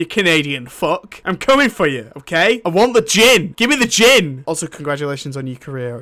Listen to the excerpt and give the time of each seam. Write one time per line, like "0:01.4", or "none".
0:01.1
0:02.6
0:03.5
0:04.4